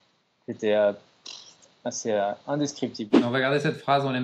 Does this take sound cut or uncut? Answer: cut